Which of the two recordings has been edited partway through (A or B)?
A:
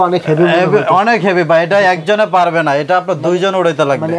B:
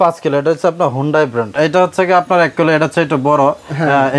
B